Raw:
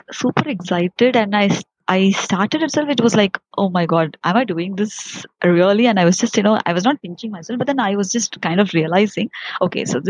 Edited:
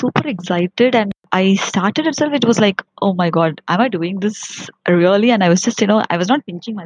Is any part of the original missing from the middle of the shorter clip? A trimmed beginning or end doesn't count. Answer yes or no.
yes